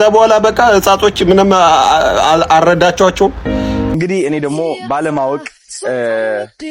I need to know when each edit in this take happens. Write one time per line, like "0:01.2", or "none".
0:03.9